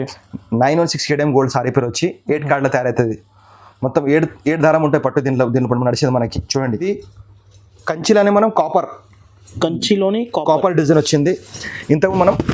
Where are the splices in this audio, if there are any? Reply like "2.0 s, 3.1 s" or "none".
6.9 s